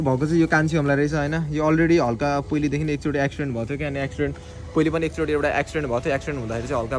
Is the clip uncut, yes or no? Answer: yes